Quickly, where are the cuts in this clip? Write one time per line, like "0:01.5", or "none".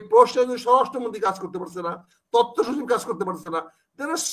none